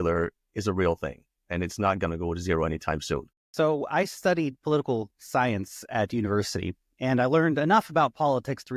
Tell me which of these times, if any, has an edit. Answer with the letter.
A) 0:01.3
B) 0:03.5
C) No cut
B